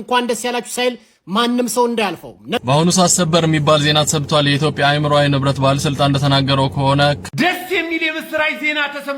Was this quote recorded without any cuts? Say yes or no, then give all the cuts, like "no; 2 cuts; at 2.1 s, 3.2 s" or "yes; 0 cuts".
no; 2 cuts; at 2.6 s, 7.2 s